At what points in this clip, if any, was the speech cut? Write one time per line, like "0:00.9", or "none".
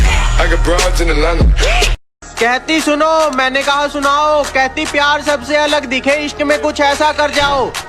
0:01.9